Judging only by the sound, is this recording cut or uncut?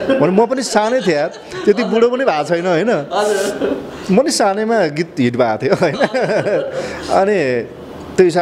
uncut